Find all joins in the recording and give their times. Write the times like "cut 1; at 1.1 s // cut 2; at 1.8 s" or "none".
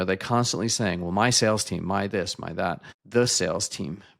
cut 1; at 2.9 s